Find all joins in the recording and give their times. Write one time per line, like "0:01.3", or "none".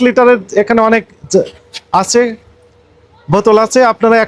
none